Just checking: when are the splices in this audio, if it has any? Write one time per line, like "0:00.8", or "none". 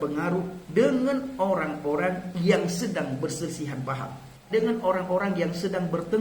0:04.5